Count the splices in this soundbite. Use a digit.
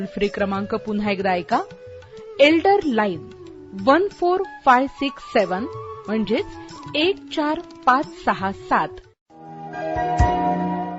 1